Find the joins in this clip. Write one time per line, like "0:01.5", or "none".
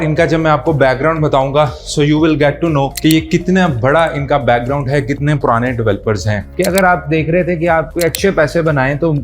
0:06.5
0:07.9